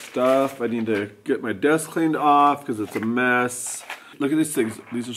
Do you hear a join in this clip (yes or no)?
yes